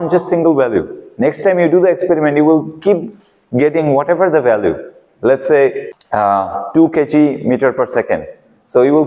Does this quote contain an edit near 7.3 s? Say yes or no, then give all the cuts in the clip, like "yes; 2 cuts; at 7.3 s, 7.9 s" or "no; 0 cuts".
no; 1 cut; at 5.8 s